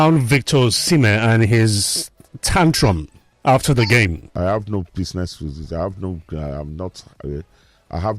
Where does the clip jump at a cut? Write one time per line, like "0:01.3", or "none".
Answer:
0:04.2